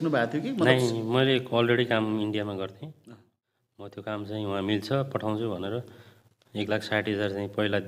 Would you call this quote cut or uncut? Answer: cut